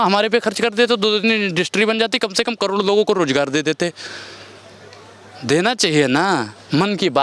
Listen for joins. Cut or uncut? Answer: uncut